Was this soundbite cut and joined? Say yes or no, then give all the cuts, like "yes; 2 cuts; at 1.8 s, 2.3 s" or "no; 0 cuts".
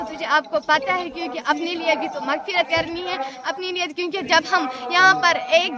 no; 0 cuts